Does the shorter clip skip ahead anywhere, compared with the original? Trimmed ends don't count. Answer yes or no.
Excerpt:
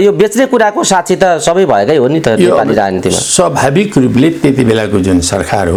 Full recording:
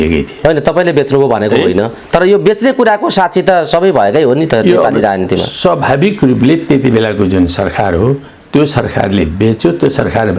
no